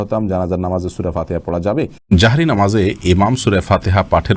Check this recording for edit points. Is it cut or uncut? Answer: cut